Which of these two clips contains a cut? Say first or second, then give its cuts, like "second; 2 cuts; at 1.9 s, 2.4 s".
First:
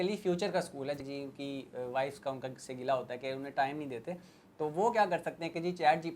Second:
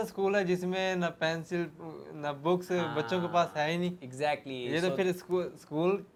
first; 1 cut; at 1.0 s